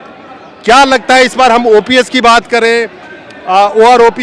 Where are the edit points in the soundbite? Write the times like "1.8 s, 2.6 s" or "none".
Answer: none